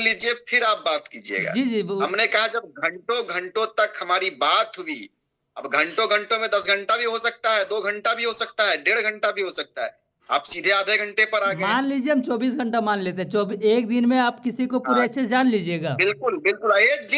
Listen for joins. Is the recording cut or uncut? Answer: uncut